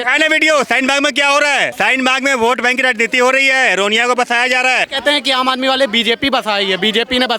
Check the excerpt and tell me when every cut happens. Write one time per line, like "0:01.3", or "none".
0:01.7
0:04.9